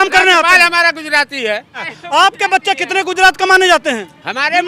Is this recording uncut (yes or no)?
no